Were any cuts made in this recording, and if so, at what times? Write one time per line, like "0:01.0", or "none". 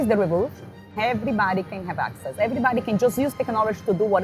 0:01.0